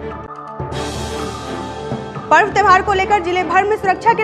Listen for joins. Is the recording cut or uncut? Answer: cut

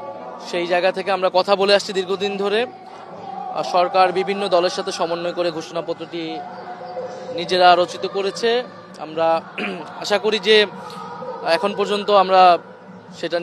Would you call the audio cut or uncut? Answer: uncut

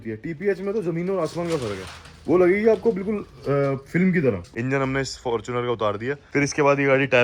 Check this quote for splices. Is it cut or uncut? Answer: cut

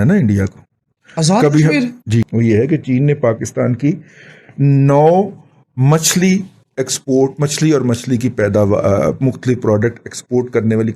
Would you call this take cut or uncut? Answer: cut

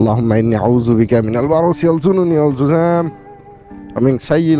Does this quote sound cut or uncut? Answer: uncut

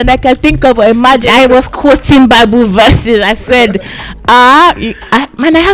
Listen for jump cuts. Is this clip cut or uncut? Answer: uncut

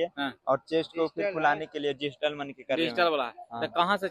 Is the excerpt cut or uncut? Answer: uncut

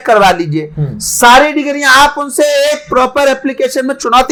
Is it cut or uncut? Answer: uncut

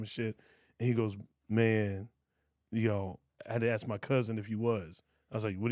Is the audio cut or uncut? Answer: cut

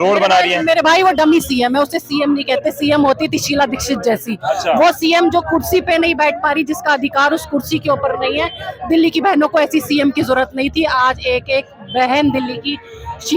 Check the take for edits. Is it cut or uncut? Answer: uncut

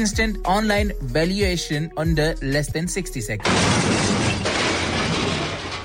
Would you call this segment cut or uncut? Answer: cut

